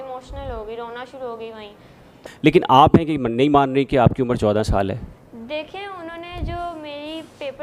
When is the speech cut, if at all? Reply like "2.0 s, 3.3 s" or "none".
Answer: 2.3 s